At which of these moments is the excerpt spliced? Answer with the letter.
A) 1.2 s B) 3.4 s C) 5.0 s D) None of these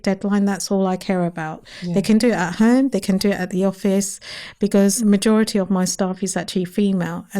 C